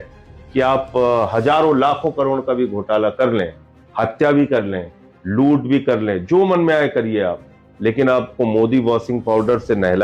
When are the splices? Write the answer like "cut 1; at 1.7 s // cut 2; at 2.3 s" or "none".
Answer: none